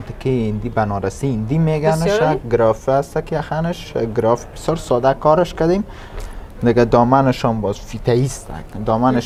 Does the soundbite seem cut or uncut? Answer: uncut